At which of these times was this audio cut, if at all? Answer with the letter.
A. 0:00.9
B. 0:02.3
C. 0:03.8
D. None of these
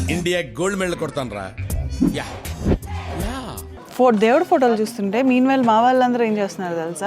C